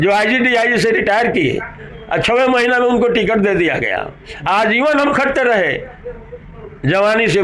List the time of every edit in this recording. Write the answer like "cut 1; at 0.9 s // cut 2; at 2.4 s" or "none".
none